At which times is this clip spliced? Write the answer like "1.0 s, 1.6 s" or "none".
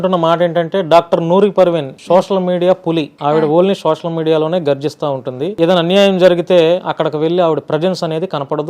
1.9 s, 3.1 s, 5.4 s